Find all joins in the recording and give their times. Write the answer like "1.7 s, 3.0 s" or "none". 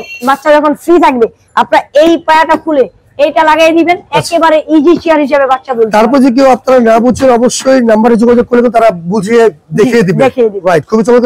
none